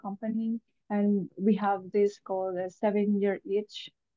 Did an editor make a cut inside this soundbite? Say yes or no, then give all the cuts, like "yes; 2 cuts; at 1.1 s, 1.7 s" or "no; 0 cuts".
no; 0 cuts